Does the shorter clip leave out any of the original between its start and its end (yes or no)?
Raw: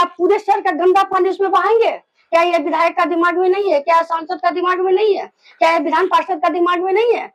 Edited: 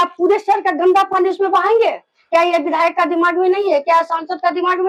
no